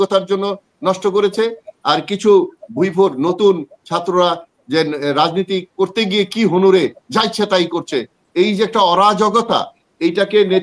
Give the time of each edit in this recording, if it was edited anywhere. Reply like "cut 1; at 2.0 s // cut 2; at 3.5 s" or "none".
none